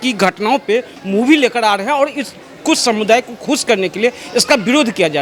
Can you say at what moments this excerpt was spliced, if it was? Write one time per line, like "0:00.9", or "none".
none